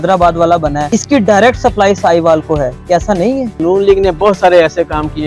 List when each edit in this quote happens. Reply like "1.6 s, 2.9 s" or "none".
0.9 s, 3.6 s